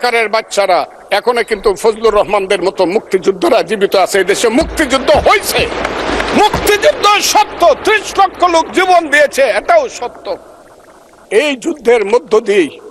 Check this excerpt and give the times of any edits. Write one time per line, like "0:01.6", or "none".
none